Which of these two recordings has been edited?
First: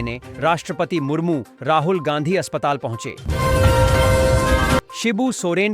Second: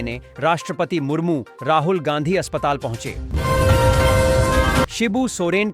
second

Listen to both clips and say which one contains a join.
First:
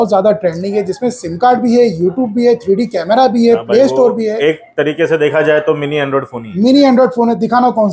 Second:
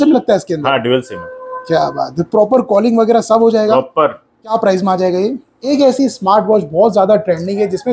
second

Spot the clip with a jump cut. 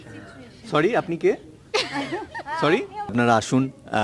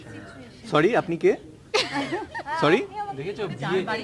first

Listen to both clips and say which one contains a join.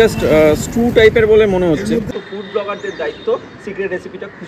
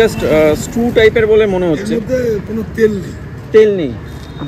first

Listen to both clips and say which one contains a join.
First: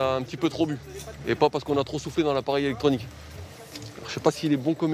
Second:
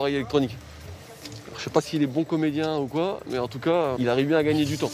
second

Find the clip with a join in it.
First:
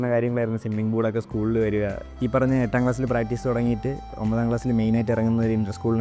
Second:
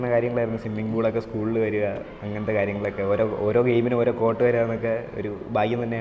first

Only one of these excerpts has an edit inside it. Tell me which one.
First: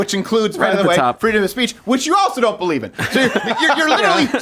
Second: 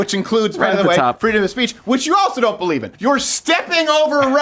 second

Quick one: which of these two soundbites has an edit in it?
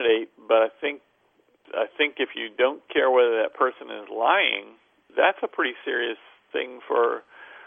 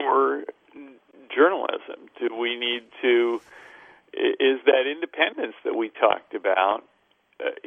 first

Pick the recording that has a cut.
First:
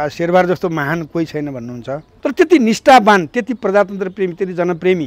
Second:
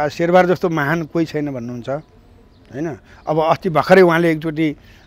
first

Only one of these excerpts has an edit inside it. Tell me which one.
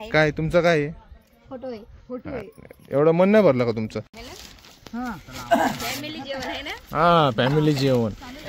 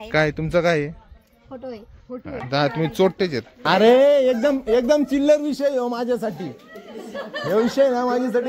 second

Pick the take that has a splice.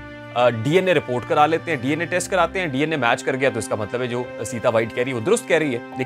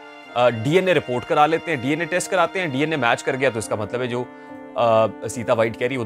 first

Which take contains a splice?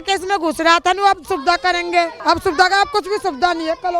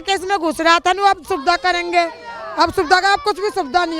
first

